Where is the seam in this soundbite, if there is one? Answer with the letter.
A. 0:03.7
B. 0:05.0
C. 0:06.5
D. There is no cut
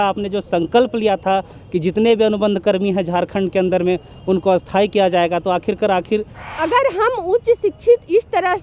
C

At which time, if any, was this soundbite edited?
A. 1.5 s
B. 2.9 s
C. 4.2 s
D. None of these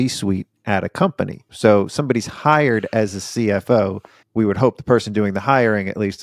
A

